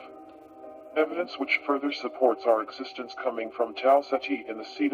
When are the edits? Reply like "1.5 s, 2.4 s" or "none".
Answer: 1.8 s